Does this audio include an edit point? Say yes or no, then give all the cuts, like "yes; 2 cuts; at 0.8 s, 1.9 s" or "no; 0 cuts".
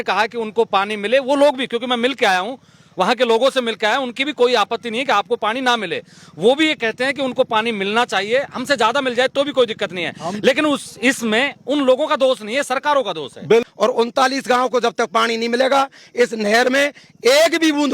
yes; 1 cut; at 13.7 s